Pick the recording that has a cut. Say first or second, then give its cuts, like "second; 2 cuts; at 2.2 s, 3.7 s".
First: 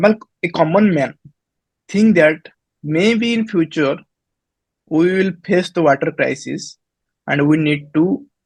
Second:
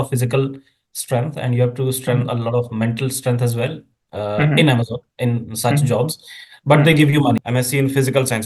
second; 1 cut; at 7.4 s